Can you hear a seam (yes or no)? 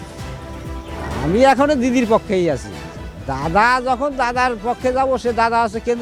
no